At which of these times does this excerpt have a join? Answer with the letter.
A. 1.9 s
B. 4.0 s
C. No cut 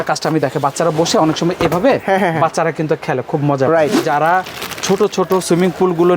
B